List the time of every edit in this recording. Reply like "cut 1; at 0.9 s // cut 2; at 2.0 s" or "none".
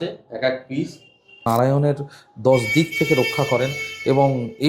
cut 1; at 1.4 s

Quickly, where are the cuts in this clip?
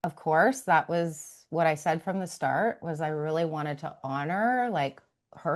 none

